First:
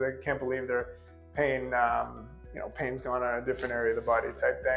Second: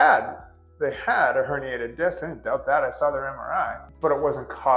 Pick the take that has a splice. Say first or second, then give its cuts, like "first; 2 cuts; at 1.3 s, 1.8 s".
second; 1 cut; at 3.8 s